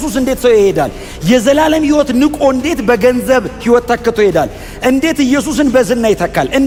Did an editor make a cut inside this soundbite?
no; 0 cuts

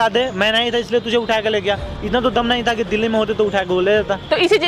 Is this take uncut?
yes; 0 cuts

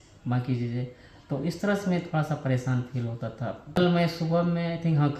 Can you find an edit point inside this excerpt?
yes; 1 cut; at 3.8 s

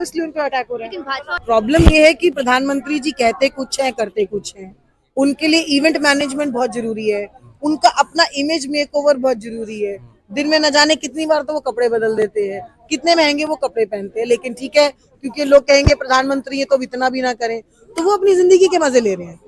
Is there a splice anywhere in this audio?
yes; 1 cut; at 1.4 s

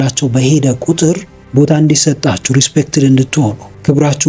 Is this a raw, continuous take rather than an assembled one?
no; 1 cut; at 1.3 s

